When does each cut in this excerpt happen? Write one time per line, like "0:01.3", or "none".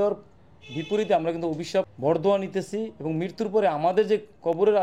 0:01.9